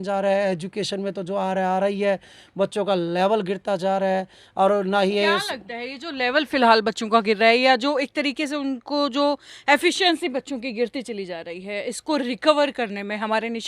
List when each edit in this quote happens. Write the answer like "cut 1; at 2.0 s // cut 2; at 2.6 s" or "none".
none